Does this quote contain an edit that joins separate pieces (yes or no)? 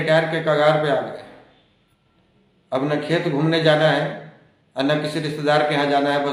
no